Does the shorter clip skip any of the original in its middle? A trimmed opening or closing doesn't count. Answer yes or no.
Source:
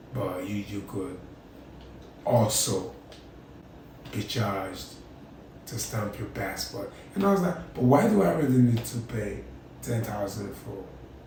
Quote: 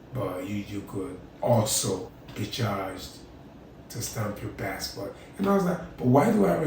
yes